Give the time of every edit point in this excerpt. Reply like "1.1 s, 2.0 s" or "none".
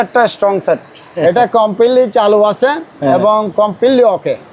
1.0 s